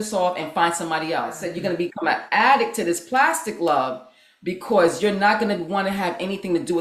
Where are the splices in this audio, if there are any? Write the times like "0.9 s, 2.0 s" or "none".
1.5 s